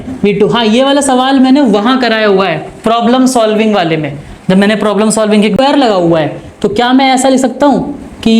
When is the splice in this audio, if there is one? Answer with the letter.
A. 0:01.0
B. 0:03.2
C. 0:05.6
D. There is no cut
C